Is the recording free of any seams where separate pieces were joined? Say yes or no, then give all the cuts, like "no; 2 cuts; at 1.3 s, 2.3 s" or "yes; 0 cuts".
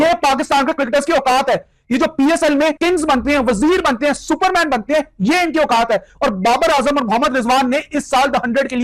no; 1 cut; at 2.8 s